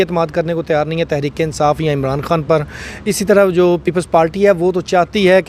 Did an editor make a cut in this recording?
no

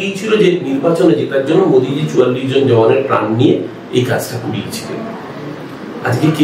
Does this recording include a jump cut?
no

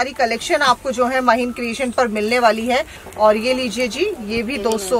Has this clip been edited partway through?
yes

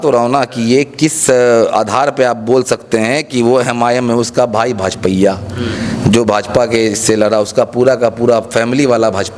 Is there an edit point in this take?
no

